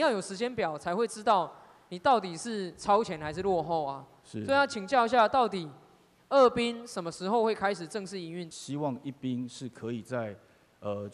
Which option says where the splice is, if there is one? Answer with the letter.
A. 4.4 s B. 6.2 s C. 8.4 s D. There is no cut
C